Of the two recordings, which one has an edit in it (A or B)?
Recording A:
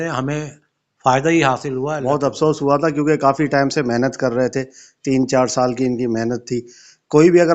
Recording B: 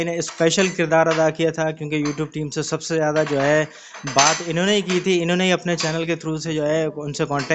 A